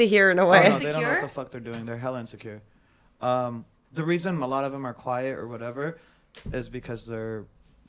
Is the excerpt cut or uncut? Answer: uncut